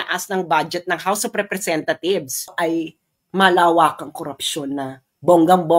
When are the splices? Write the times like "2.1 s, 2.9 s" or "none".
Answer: 2.5 s